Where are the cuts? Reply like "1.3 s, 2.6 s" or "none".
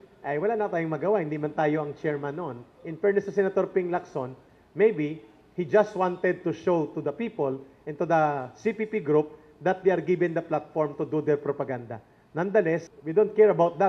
13.0 s

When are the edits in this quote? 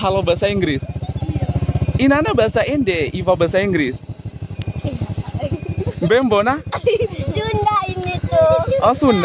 none

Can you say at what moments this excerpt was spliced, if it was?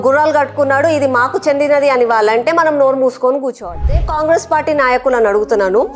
4.0 s

